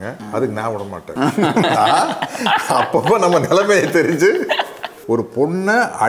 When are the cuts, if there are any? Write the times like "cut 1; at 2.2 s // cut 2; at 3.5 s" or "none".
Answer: cut 1; at 4.9 s